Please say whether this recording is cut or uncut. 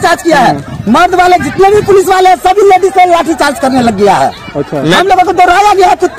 uncut